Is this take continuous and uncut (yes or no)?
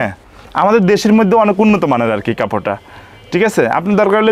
yes